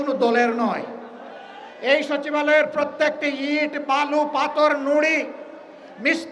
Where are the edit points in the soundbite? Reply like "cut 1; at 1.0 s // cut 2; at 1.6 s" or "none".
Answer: none

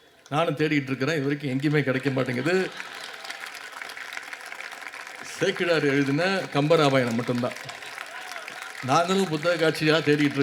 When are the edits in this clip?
none

